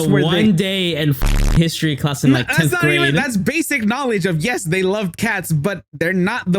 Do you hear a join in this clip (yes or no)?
no